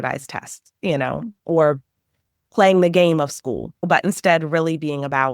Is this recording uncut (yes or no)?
no